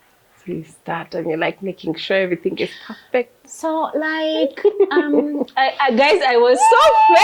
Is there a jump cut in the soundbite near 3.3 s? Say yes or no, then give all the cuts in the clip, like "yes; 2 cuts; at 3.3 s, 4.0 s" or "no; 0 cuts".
no; 0 cuts